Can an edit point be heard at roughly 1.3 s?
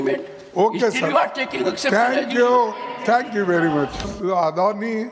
no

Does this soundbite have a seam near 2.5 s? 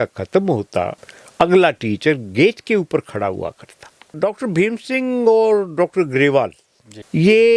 no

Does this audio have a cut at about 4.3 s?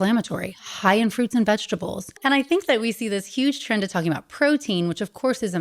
no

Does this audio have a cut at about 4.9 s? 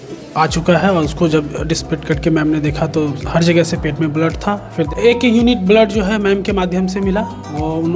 yes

